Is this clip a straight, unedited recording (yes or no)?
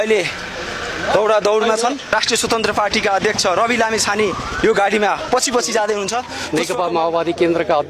no